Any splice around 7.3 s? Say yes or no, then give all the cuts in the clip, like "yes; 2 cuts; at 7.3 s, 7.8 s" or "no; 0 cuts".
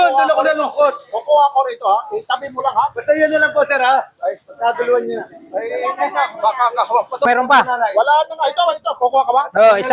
yes; 1 cut; at 7.3 s